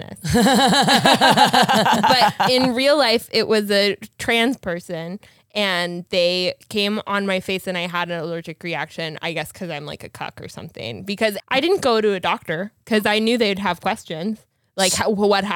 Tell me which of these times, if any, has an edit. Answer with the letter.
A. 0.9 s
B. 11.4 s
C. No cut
B